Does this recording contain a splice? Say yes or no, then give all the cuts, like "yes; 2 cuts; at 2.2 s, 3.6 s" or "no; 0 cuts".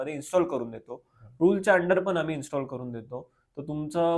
no; 0 cuts